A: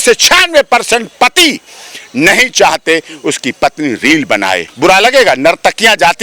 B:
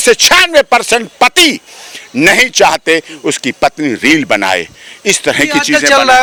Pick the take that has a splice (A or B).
A